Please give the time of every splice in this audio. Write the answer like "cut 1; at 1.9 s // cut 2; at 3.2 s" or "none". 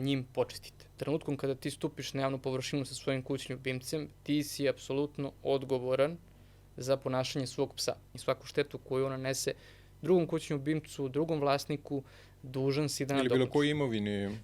cut 1; at 1.0 s // cut 2; at 8.1 s